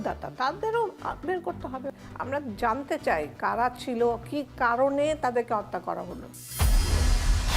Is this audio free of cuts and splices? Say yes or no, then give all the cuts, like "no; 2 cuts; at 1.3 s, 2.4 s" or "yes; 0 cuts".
no; 2 cuts; at 1.9 s, 6.4 s